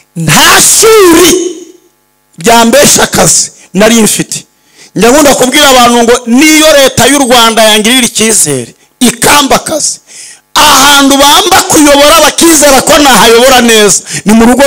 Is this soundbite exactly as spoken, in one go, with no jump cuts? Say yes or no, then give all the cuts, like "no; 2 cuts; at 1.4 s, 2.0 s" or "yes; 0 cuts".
yes; 0 cuts